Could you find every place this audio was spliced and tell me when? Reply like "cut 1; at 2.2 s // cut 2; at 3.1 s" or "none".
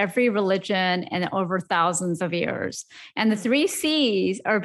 none